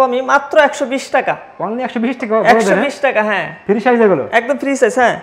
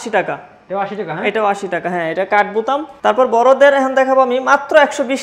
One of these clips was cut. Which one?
second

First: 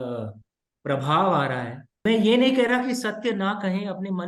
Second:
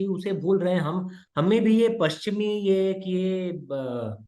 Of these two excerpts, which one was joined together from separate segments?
first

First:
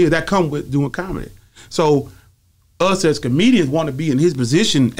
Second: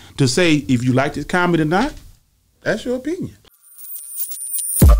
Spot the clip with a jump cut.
second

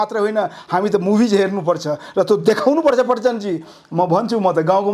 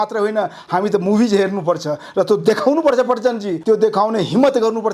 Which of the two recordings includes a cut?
second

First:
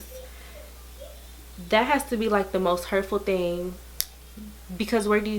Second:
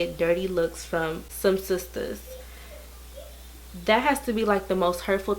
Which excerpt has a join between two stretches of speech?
second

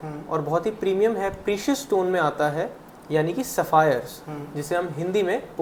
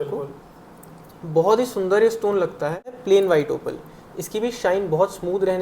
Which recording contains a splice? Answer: second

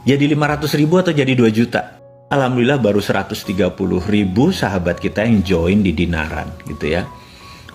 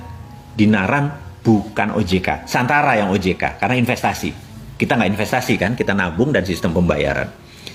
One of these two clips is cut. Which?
first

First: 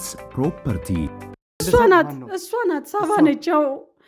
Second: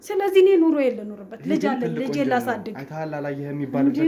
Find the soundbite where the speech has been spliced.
first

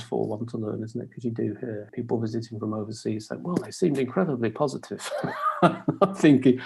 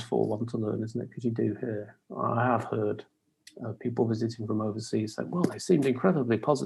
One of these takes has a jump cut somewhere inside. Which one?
first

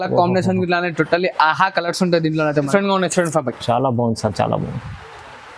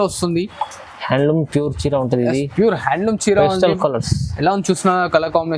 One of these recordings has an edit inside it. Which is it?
first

